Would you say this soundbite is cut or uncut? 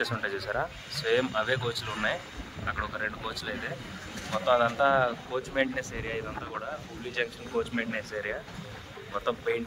uncut